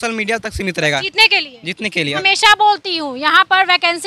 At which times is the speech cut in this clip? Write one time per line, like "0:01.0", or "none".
0:02.2

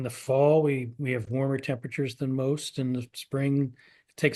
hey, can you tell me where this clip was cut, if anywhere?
none

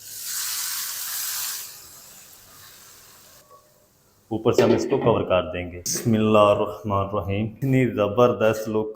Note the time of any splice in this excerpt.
0:03.4
0:05.9
0:07.5

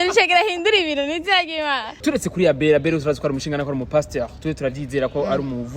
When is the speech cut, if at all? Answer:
0:02.0

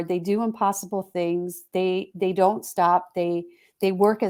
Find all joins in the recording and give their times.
none

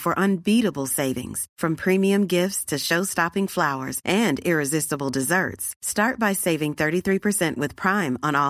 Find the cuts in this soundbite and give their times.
none

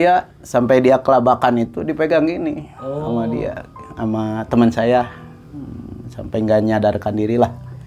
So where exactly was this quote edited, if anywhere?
none

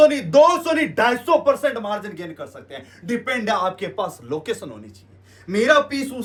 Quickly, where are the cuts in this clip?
none

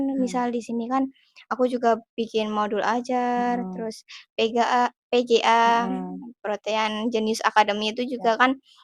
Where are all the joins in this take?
none

